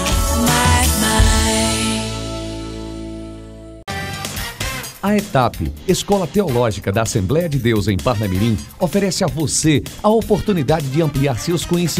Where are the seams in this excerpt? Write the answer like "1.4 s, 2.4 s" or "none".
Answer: 3.8 s